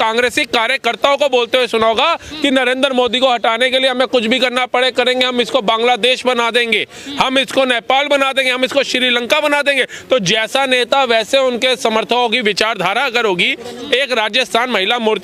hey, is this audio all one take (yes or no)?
yes